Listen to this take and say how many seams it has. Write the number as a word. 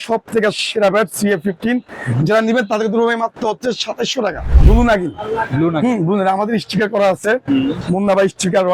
one